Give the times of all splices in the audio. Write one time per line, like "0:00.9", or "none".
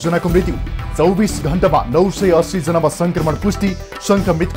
none